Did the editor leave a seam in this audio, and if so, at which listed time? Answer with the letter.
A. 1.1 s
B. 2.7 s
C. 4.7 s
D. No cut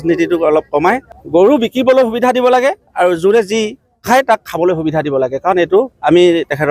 A